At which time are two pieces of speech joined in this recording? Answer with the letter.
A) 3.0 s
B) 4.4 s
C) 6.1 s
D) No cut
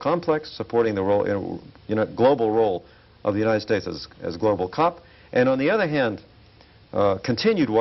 D